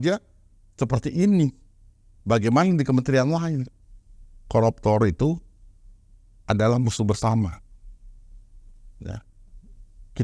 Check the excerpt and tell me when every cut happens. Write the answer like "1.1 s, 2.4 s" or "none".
4.4 s